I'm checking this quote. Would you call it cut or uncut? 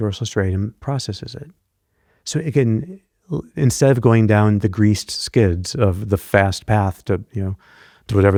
uncut